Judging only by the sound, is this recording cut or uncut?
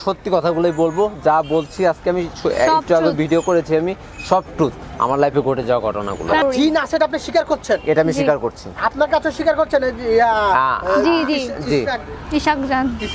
cut